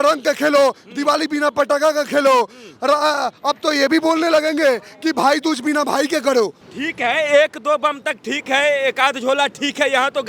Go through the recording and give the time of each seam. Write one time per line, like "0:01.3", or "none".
0:06.6